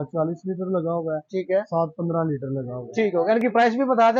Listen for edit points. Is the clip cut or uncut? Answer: uncut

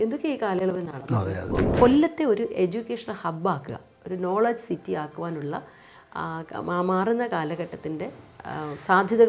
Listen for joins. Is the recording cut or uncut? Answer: cut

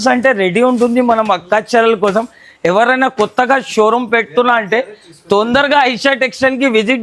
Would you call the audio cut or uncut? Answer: uncut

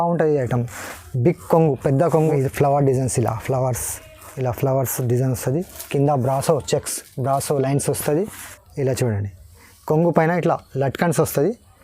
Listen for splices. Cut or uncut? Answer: cut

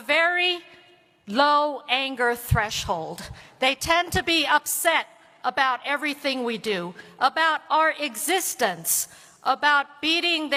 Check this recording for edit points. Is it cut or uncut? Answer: uncut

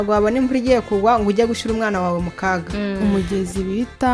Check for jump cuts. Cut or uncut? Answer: cut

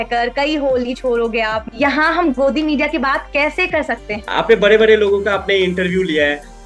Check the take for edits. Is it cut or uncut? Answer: cut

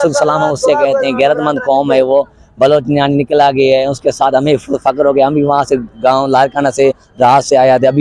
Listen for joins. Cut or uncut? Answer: uncut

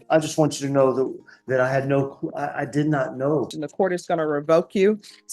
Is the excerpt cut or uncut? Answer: cut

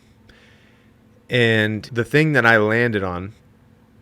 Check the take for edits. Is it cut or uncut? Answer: cut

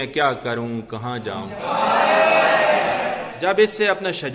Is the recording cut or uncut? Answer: cut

